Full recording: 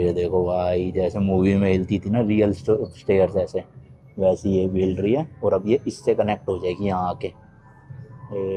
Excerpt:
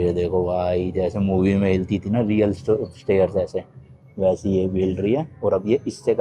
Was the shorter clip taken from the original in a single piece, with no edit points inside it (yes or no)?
yes